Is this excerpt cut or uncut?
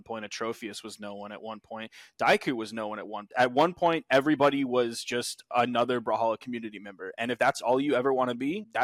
cut